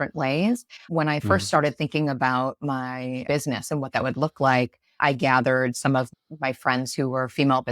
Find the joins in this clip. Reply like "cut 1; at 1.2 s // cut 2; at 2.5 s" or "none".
cut 1; at 3.2 s // cut 2; at 6.1 s

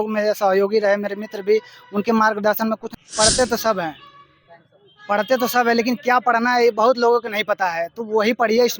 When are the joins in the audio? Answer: cut 1; at 2.9 s

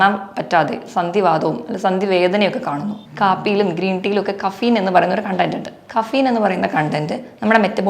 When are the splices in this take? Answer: cut 1; at 3.0 s

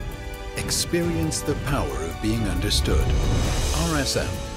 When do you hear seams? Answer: none

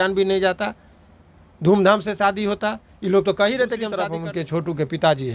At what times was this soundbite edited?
cut 1; at 3.9 s

